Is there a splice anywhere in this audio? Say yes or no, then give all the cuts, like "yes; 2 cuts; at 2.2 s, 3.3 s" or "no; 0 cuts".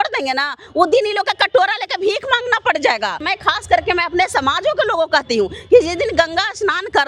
yes; 1 cut; at 3.2 s